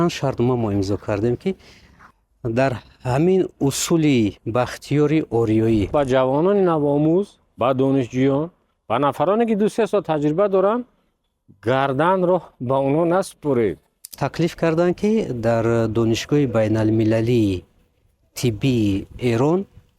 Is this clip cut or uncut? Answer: cut